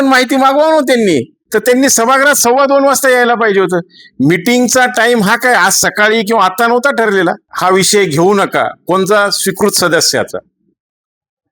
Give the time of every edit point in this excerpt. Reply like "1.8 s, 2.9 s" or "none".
1.4 s, 7.5 s